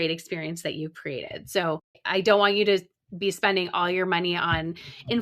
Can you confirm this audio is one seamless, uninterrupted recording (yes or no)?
no